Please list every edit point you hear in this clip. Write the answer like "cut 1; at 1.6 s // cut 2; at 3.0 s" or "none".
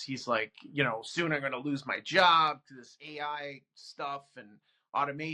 none